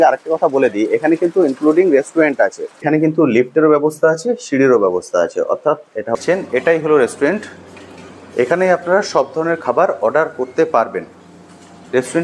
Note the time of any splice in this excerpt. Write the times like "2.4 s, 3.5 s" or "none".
2.8 s, 6.1 s